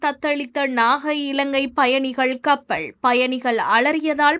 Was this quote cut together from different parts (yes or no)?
no